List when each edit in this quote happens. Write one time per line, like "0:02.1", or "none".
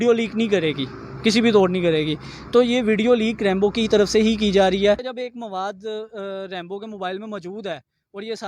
0:05.1